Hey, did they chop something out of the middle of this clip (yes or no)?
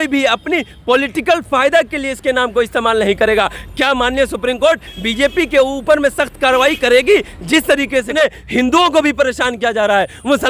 yes